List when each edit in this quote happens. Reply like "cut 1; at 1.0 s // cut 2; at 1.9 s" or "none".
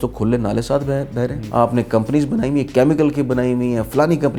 cut 1; at 1.4 s